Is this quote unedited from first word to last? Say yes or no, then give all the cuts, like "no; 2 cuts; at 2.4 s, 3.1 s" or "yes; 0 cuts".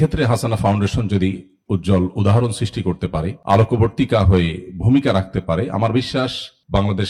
yes; 0 cuts